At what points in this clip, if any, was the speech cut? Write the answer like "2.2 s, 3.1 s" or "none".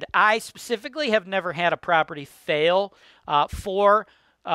none